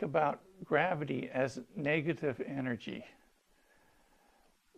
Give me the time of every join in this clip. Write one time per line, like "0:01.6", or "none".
none